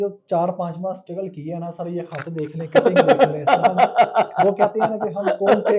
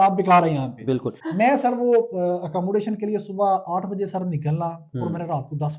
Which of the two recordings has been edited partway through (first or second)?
second